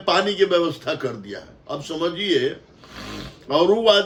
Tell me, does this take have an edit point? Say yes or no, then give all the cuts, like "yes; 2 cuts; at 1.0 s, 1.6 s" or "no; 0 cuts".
no; 0 cuts